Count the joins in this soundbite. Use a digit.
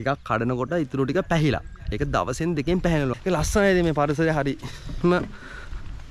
1